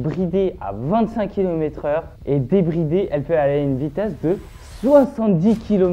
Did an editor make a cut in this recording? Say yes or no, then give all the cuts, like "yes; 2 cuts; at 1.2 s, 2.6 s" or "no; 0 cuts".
no; 0 cuts